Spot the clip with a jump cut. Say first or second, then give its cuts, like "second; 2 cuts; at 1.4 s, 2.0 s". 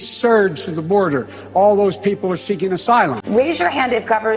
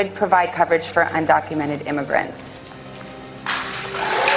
first; 1 cut; at 3.2 s